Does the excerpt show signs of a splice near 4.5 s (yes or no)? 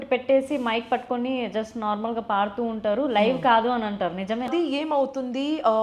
yes